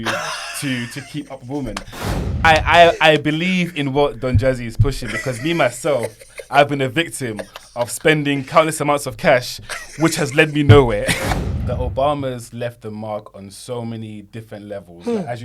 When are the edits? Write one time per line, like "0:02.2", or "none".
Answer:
0:02.1
0:11.2